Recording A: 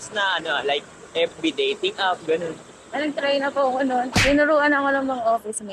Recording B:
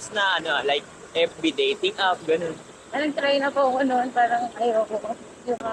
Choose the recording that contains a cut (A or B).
A